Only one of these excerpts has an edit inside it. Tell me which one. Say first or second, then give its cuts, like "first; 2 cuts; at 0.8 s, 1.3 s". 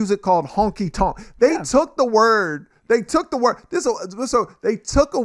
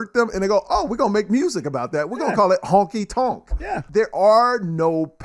second; 1 cut; at 3.8 s